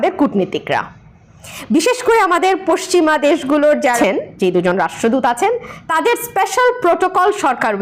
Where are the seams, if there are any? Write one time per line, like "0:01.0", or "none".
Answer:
0:03.9